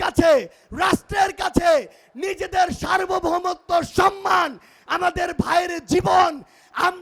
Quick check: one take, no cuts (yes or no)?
yes